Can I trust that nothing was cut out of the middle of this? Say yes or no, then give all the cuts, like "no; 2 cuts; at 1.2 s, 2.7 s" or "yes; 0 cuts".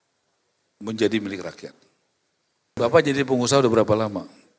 no; 1 cut; at 2.8 s